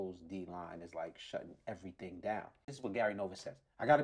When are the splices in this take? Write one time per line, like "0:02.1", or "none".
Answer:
0:02.7